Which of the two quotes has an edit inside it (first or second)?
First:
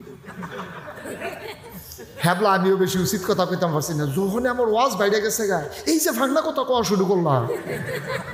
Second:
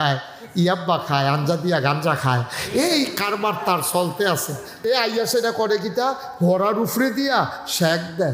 second